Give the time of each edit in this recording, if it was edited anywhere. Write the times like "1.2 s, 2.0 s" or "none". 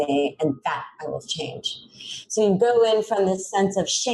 none